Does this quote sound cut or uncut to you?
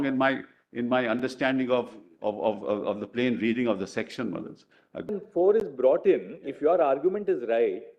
cut